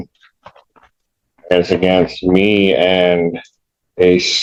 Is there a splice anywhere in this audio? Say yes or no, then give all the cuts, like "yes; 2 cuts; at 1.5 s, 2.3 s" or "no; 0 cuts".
no; 0 cuts